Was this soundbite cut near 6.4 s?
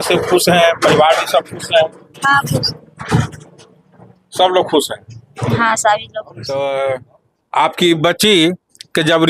yes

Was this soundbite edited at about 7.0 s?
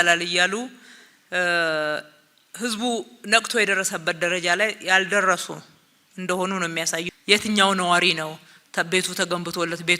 yes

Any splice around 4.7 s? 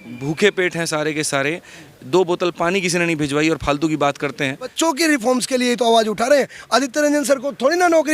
yes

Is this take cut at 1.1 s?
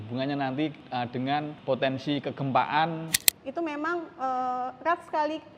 yes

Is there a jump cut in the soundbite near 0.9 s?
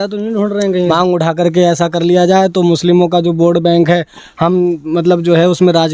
yes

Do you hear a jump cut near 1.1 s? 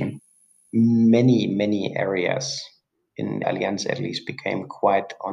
no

